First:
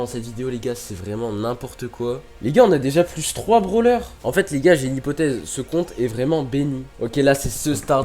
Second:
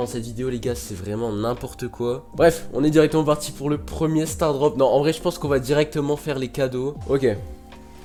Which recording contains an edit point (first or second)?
first